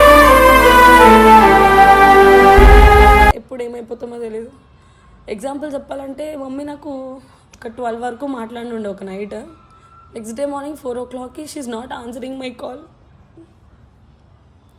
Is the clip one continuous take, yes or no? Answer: no